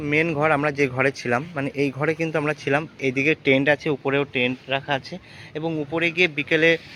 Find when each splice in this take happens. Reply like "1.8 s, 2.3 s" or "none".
none